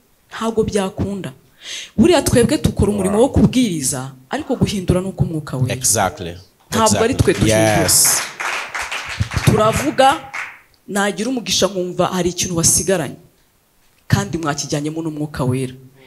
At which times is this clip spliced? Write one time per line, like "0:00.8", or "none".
none